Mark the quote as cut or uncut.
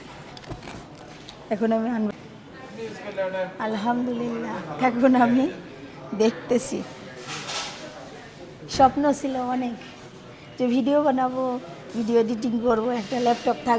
cut